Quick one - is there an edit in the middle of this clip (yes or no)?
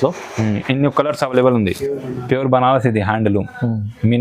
yes